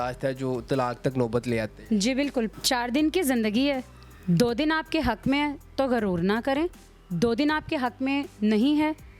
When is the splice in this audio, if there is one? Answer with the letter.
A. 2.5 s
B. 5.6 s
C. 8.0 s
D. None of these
A